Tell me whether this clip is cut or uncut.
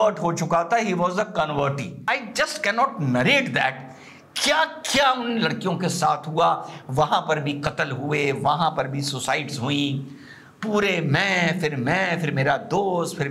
cut